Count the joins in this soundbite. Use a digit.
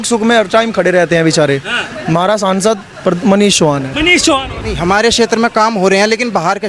1